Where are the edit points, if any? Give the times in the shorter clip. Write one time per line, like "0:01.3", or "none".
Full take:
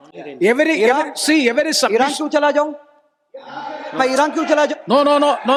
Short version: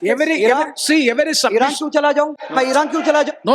0:02.4

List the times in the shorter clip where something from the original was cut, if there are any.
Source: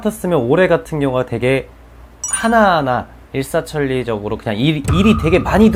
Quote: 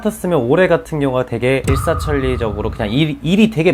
0:01.6

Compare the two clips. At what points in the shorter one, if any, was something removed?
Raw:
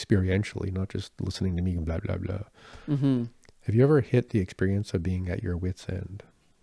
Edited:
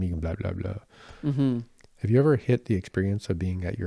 none

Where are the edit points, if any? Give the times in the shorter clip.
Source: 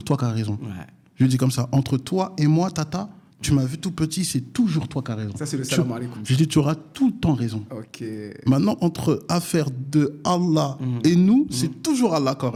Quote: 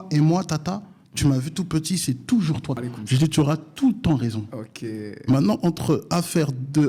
0:02.8

